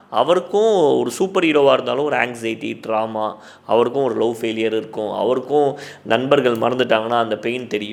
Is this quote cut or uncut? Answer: uncut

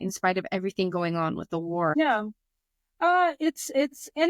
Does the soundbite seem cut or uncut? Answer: cut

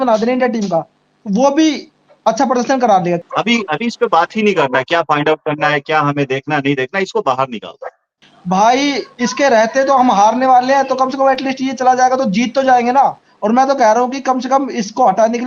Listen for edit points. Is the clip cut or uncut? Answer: cut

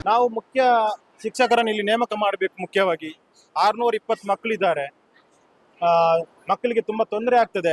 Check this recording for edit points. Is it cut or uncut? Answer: uncut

